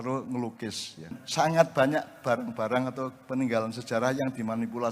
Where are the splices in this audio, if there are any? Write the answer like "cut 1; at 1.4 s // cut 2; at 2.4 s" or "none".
cut 1; at 1.2 s

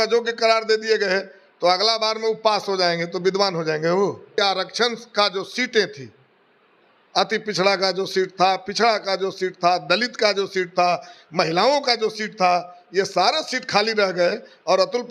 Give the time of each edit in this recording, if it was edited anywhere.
cut 1; at 4.3 s

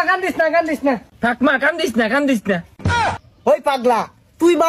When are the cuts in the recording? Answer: cut 1; at 1.1 s // cut 2; at 3.2 s

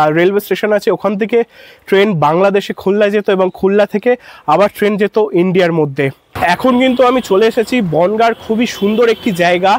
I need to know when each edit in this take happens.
cut 1; at 6.3 s

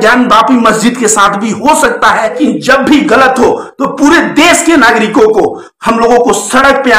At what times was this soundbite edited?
cut 1; at 2.4 s

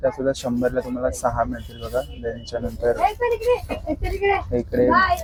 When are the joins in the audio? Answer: none

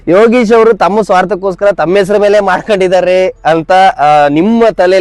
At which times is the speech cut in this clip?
none

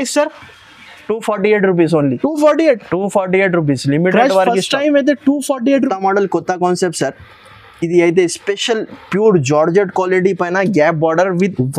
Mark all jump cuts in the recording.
cut 1; at 5.8 s

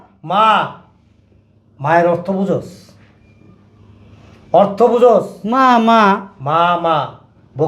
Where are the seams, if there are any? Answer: none

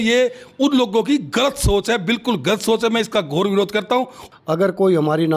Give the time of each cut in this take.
cut 1; at 4.2 s

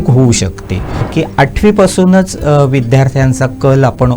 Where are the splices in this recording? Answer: cut 1; at 1.1 s

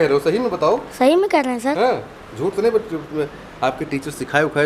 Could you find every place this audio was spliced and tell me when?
none

